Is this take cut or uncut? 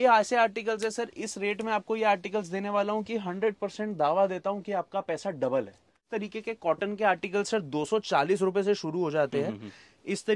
cut